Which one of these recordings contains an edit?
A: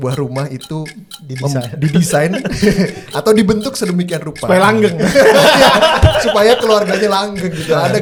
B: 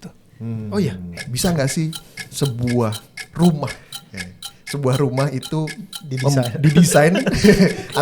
B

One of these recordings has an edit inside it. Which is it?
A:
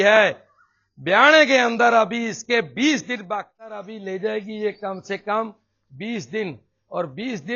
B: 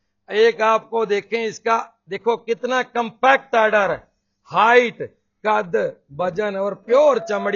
A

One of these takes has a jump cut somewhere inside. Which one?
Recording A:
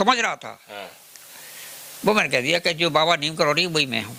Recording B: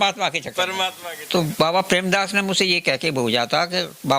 B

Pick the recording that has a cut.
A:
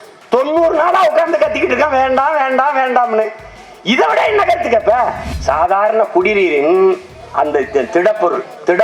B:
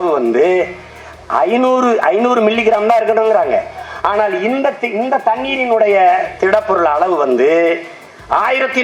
A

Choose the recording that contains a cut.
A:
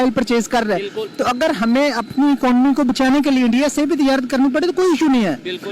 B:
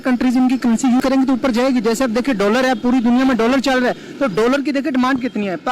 B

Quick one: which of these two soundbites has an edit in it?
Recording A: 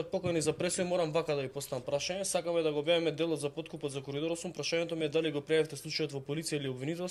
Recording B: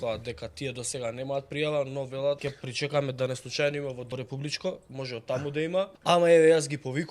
B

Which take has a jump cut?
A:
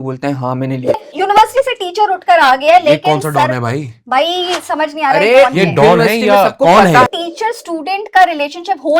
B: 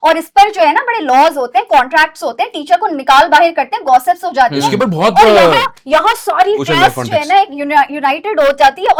A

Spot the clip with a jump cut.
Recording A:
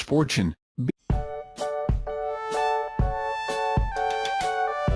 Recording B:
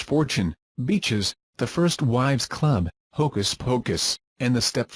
B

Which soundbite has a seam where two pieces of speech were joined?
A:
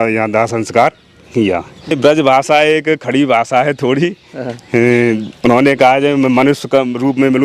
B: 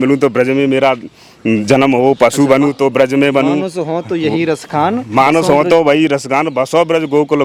A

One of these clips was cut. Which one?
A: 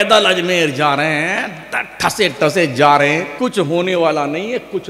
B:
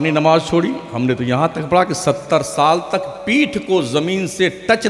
A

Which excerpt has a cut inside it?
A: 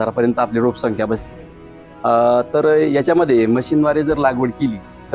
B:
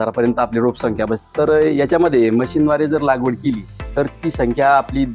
B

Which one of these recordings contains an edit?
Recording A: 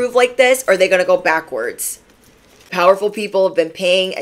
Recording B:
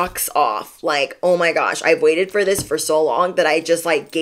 A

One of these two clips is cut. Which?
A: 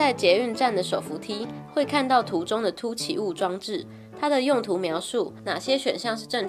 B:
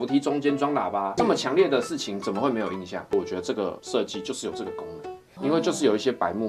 B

